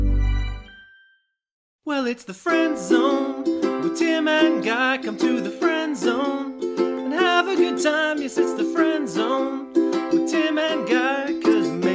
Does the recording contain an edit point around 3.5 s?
no; 1 cut; at 1.8 s

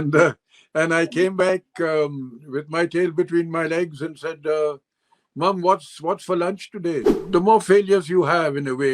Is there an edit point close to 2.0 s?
no; 1 cut; at 7.2 s

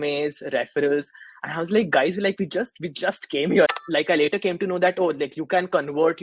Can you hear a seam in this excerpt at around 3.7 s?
yes; 1 cut; at 3.7 s

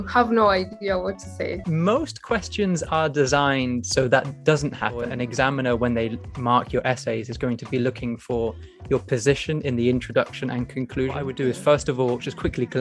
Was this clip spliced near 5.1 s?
yes; 3 cuts; at 1.7 s, 5.1 s, 11.3 s

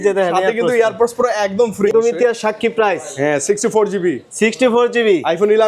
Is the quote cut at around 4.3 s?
no; 1 cut; at 1.9 s

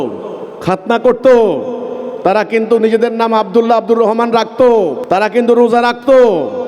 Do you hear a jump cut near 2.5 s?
no; 1 cut; at 5.0 s

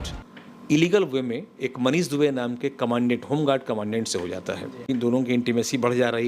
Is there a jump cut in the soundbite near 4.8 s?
yes; 1 cut; at 4.8 s

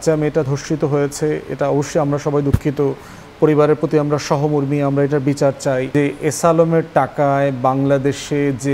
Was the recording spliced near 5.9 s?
yes; 1 cut; at 5.9 s

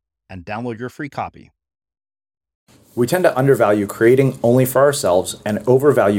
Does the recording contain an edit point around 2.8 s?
yes; 1 cut; at 2.8 s

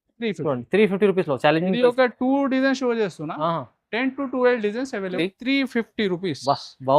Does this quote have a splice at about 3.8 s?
no; 1 cut; at 5.2 s

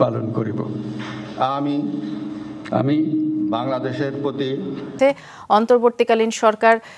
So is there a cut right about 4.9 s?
yes; 1 cut; at 4.9 s

